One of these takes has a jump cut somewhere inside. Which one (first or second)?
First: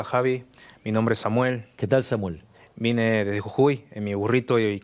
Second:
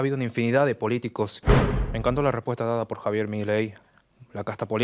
second